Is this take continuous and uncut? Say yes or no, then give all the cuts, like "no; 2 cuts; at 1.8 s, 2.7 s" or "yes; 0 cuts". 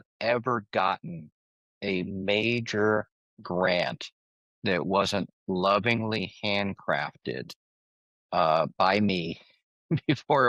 yes; 0 cuts